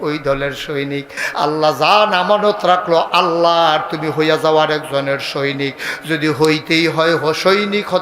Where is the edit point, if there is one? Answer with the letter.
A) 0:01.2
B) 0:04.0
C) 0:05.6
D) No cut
A